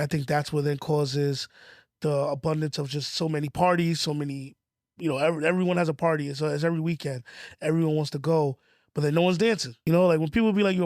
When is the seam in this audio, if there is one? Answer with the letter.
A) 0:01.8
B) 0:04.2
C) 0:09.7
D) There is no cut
C